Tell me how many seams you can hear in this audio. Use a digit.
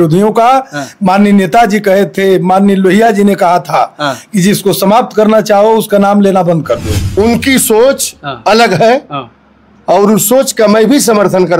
1